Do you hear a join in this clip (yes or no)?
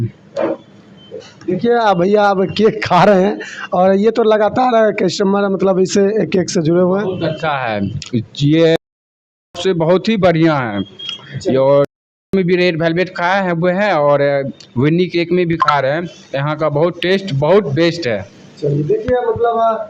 no